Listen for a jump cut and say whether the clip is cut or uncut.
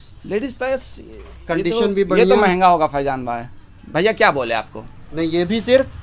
uncut